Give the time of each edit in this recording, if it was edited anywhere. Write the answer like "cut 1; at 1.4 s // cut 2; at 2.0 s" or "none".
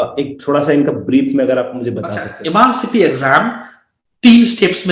cut 1; at 2.3 s